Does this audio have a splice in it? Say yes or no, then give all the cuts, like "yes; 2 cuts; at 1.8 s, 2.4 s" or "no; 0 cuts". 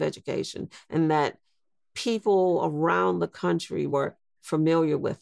yes; 1 cut; at 3.9 s